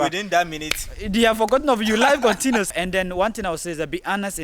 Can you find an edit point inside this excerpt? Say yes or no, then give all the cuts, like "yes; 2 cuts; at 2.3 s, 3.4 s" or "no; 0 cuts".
yes; 1 cut; at 2.7 s